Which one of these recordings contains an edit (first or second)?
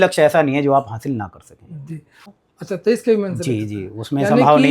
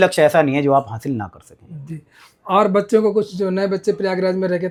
first